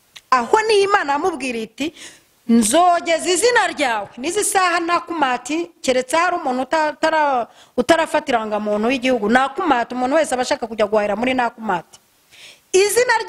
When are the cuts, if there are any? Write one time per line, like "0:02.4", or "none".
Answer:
none